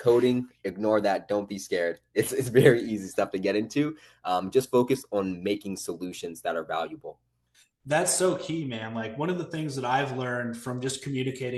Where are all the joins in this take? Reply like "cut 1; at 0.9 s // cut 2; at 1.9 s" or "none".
none